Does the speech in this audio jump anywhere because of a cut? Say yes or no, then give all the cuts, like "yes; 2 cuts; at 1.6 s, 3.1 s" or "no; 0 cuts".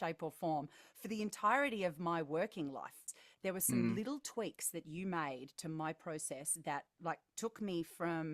yes; 1 cut; at 3.1 s